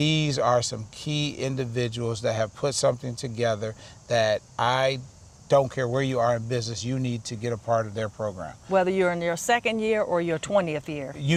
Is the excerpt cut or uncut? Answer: uncut